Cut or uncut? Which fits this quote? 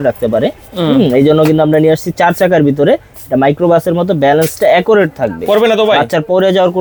uncut